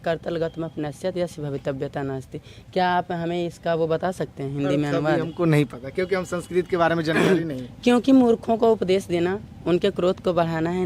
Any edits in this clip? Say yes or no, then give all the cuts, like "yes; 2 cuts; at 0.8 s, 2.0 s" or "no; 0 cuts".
no; 0 cuts